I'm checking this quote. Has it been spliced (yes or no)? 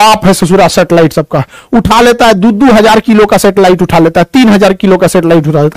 no